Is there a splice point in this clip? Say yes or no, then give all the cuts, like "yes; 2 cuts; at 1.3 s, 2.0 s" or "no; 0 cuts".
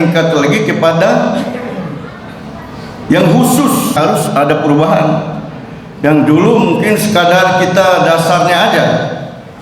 yes; 1 cut; at 4.0 s